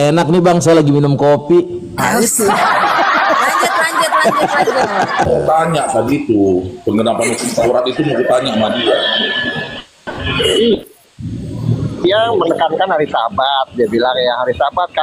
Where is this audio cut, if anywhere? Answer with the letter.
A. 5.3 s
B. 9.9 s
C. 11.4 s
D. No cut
A